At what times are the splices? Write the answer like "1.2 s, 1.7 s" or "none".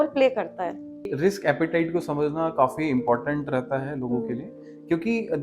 1.1 s